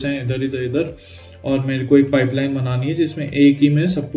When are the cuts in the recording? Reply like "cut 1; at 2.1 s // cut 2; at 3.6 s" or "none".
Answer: none